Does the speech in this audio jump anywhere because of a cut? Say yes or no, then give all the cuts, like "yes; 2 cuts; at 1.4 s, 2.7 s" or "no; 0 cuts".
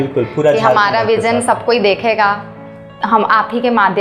no; 0 cuts